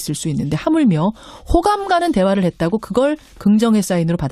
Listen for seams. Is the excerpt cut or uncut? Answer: uncut